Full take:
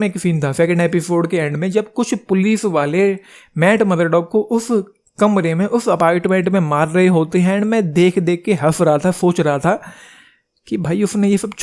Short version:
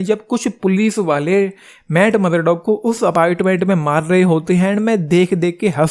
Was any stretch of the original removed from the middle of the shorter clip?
yes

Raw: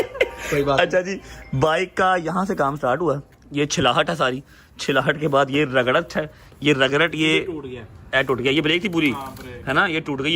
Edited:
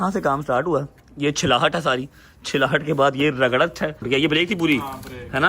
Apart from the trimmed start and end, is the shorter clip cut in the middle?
yes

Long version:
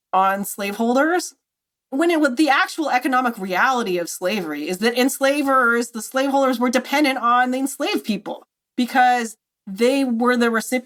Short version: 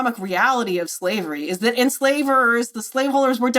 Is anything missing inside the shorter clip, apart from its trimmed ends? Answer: no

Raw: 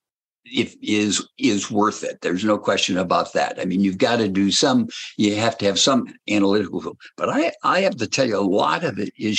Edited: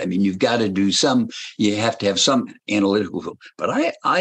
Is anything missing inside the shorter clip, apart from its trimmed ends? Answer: no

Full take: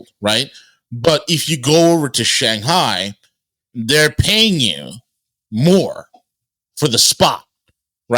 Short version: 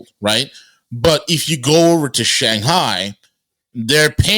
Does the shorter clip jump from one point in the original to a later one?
no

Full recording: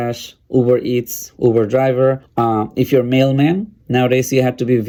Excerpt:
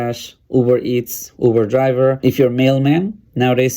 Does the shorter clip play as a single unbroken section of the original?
no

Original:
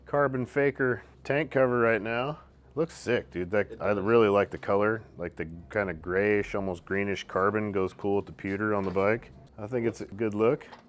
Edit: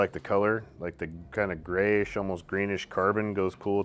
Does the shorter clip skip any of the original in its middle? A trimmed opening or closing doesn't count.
no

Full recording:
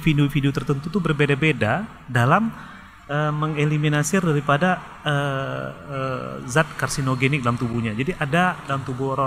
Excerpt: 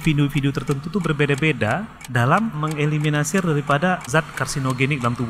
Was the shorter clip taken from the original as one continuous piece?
no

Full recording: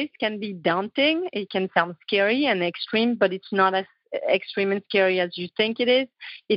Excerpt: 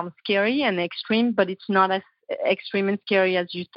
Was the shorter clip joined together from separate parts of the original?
no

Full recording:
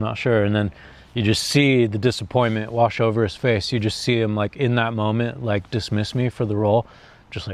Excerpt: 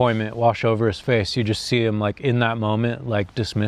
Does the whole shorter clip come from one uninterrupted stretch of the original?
yes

